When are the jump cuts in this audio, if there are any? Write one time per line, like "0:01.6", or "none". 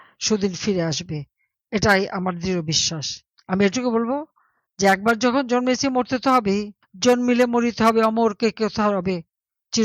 0:03.3